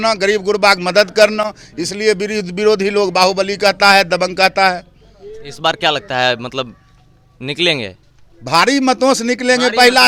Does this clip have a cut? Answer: no; 0 cuts

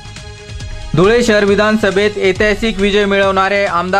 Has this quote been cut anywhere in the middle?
no; 0 cuts

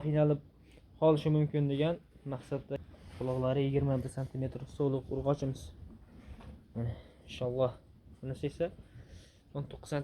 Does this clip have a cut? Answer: yes; 1 cut; at 2.7 s

